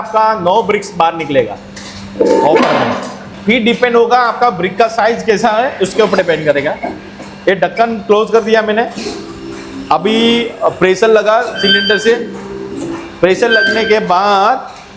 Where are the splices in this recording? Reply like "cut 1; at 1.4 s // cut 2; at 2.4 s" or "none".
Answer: cut 1; at 3.2 s